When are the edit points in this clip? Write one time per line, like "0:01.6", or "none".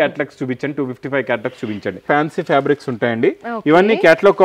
0:02.0

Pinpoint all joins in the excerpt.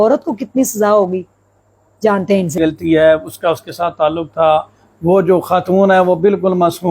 0:02.5

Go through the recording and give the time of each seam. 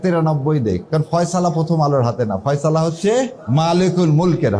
0:00.8
0:03.4

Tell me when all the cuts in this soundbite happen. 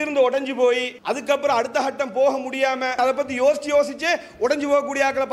0:00.9
0:02.9

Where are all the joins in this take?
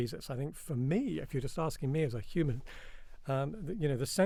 none

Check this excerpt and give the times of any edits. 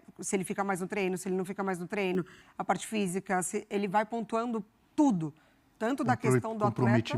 none

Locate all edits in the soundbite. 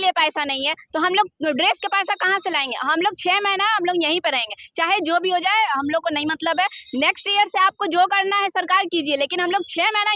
none

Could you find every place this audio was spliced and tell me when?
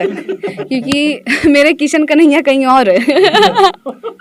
none

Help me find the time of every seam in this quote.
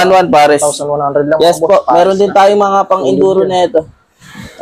none

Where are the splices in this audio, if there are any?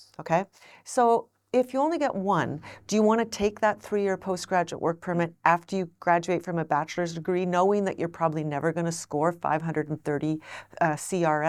none

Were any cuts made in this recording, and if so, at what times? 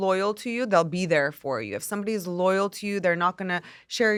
none

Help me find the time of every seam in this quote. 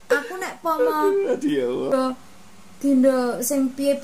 0:01.9

